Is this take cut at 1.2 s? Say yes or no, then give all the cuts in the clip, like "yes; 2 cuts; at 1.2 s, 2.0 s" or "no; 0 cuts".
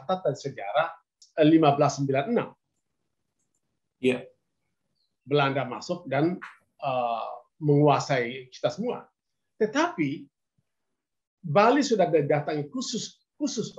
yes; 1 cut; at 1.2 s